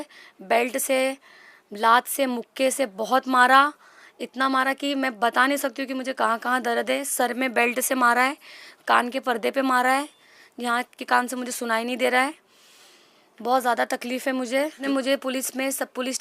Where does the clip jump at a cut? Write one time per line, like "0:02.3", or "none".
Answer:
0:14.8